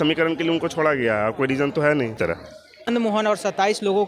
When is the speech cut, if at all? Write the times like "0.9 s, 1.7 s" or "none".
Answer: 2.2 s